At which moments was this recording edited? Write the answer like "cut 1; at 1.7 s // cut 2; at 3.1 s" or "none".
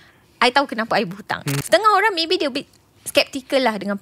cut 1; at 1.5 s